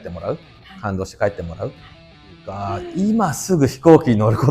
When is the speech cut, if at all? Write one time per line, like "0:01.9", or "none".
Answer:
0:02.3